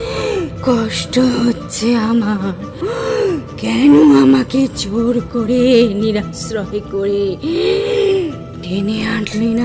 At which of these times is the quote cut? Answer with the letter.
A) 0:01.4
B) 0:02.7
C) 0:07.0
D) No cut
B